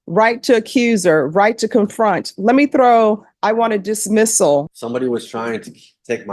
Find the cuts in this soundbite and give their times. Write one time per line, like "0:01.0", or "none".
0:04.7